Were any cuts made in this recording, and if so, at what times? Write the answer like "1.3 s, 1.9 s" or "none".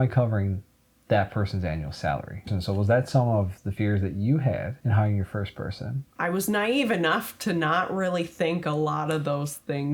2.5 s, 4.8 s, 6.1 s